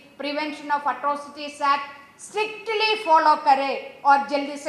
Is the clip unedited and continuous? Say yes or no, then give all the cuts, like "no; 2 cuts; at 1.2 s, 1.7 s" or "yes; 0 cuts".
yes; 0 cuts